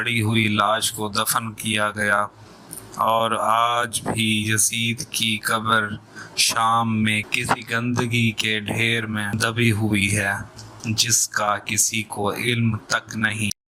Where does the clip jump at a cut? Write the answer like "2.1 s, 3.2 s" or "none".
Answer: none